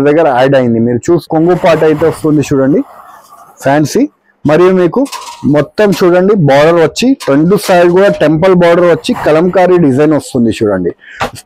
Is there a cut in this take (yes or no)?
yes